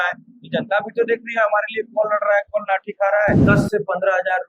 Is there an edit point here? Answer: yes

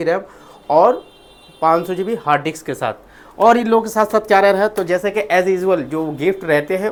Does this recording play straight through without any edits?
yes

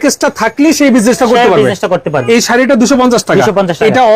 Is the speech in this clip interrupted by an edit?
yes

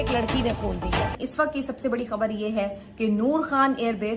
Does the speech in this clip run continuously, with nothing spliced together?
no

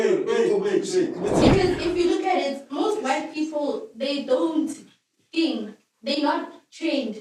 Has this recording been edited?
yes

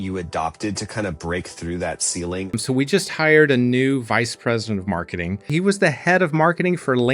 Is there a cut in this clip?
yes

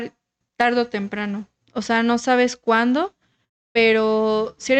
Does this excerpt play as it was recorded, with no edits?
yes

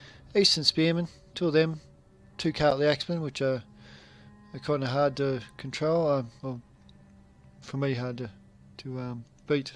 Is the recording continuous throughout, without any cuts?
no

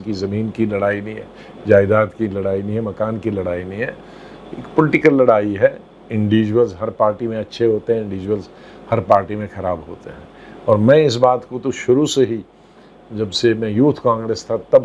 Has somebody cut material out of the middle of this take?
no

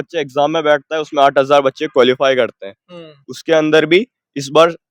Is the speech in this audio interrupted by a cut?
no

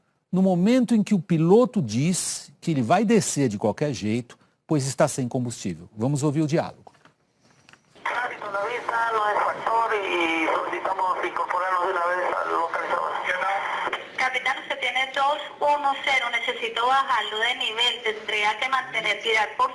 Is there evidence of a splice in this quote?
no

